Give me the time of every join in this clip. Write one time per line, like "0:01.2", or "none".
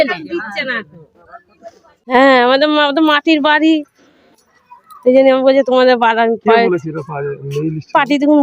0:02.1